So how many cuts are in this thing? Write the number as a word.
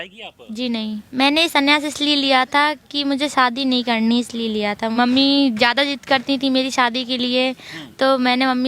two